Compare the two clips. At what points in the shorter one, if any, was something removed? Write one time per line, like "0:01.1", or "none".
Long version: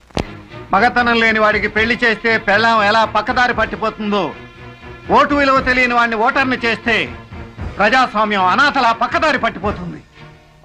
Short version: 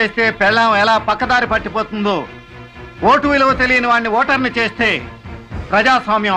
none

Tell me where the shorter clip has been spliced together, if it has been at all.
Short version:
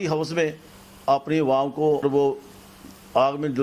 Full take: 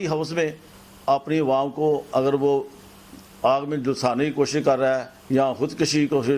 0:02.0

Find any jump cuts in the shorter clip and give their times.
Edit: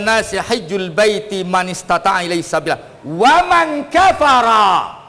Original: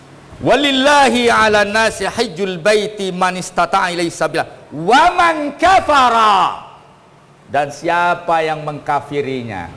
none

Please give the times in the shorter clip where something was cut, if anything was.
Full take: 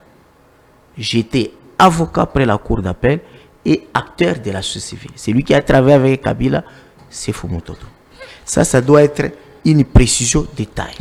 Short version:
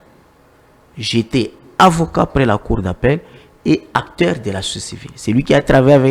none

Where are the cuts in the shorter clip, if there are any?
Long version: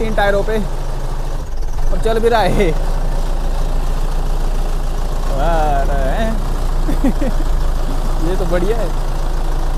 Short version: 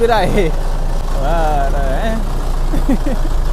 0:01.0

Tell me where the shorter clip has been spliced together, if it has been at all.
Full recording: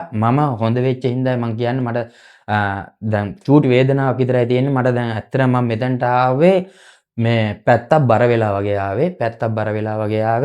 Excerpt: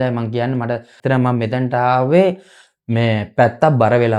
0:00.9

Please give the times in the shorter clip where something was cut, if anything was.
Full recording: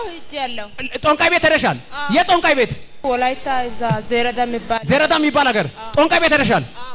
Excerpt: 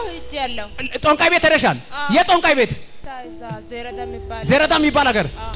0:02.9

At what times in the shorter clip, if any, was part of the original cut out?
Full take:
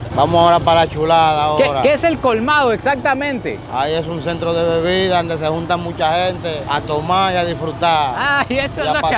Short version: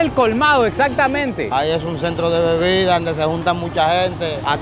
0:01.5

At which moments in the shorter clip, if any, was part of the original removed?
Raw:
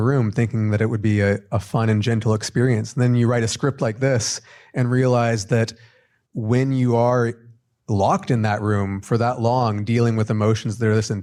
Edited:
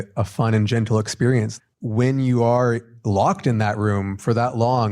0:01.5
0:02.9

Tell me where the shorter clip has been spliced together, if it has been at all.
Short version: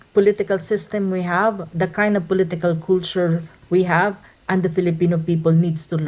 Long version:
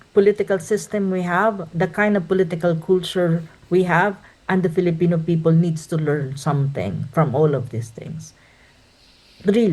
none

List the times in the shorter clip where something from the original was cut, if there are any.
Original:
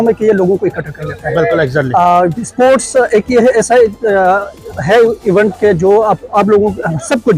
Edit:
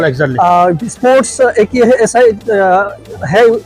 none

